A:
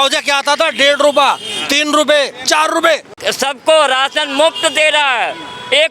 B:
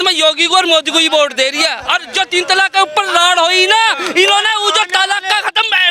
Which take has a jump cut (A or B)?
A